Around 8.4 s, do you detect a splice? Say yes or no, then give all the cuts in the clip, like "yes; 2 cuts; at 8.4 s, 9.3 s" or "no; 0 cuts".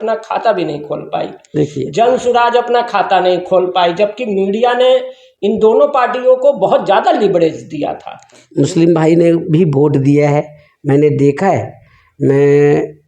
yes; 1 cut; at 8.4 s